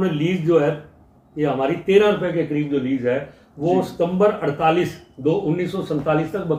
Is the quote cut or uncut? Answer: uncut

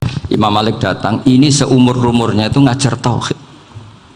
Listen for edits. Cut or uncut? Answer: uncut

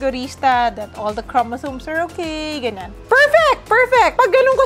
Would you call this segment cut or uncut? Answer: cut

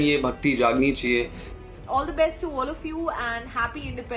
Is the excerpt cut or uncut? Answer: cut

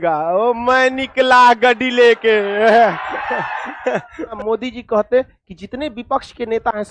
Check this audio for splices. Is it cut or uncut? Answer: cut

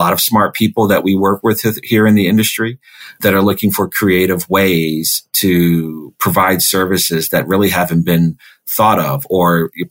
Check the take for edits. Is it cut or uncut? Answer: uncut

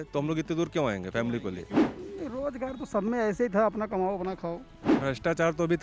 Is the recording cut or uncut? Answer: cut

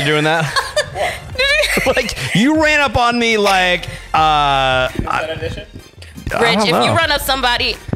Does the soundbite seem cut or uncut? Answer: uncut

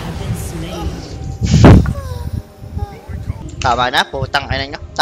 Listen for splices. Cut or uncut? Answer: cut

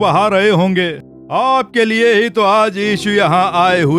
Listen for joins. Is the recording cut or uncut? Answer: cut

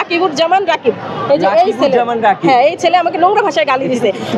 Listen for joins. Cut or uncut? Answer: uncut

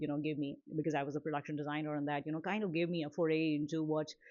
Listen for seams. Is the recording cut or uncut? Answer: uncut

